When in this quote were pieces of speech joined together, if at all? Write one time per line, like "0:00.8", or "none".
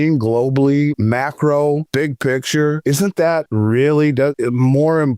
0:01.0
0:01.9
0:03.1
0:04.4